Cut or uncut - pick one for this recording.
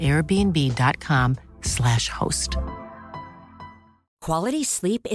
cut